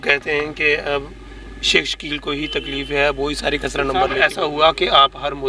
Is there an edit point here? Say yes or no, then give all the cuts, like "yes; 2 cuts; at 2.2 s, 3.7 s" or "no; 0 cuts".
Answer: yes; 1 cut; at 4.1 s